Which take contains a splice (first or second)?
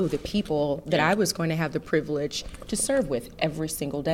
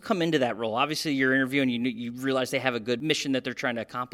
second